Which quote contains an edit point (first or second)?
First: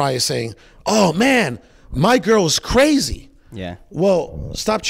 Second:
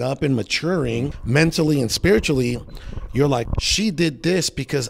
second